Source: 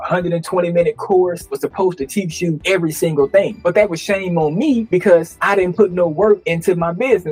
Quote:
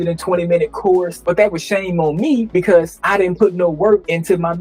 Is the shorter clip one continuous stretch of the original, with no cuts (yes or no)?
no